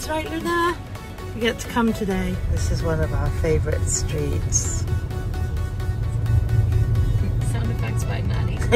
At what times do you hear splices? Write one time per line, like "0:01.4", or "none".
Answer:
0:02.5
0:05.9